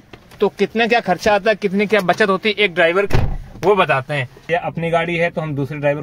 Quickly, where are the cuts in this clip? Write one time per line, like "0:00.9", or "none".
0:04.5